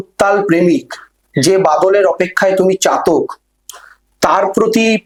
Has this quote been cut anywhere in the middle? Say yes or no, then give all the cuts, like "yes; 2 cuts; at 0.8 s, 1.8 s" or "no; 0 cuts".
no; 0 cuts